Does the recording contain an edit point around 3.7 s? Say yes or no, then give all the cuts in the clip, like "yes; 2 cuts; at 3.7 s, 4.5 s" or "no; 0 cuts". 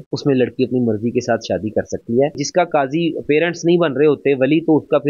no; 1 cut; at 2.4 s